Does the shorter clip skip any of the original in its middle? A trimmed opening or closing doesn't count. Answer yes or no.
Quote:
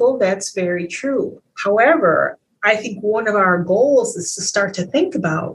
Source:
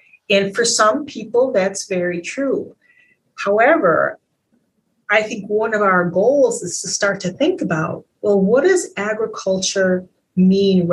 yes